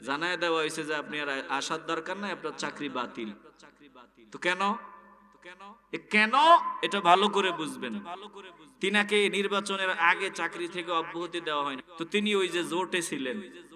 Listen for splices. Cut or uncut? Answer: cut